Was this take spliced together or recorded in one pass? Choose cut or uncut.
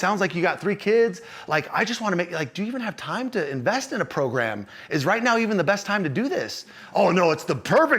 uncut